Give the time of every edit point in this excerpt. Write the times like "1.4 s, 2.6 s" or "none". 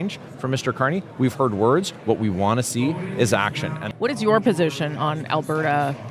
3.8 s